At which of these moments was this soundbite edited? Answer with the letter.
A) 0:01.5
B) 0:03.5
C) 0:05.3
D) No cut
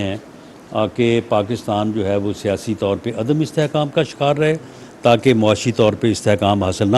B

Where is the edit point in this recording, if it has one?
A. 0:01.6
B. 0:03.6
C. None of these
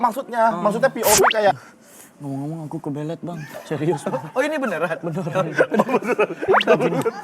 A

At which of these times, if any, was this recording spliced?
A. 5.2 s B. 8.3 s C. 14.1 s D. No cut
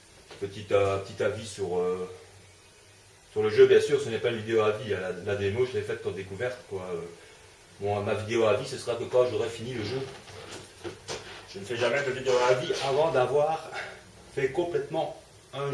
A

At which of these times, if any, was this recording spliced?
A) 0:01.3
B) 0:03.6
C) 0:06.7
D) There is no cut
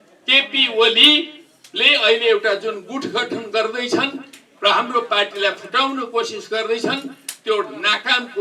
D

